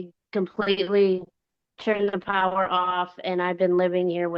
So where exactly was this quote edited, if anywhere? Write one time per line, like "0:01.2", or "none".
none